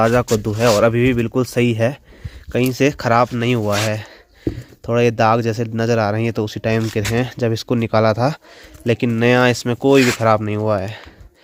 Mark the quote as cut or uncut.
uncut